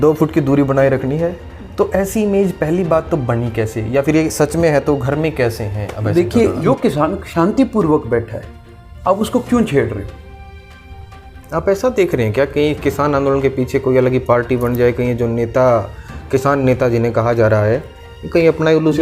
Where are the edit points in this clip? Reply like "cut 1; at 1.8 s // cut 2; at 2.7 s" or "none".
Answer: cut 1; at 6.6 s